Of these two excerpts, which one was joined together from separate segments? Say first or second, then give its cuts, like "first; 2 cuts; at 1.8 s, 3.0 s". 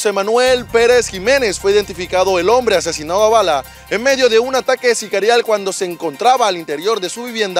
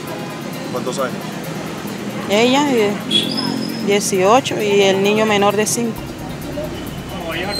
second; 1 cut; at 6.4 s